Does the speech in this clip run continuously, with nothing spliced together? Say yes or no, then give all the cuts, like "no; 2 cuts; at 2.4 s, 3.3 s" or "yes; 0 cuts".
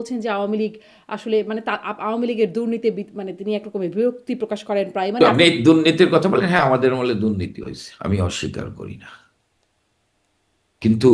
no; 1 cut; at 5.2 s